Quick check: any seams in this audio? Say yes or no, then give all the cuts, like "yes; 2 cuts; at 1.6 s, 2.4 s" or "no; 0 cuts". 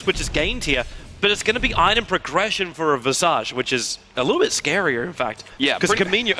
no; 0 cuts